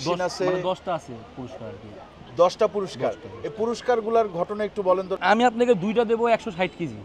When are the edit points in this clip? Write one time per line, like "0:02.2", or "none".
0:05.2